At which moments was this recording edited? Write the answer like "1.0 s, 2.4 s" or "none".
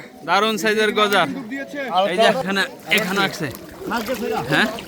2.4 s